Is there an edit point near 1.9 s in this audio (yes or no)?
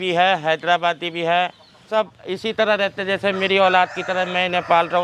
yes